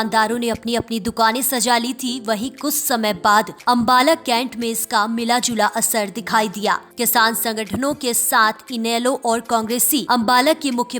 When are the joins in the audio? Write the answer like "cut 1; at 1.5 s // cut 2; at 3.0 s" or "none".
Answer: cut 1; at 3.5 s // cut 2; at 6.9 s // cut 3; at 10.0 s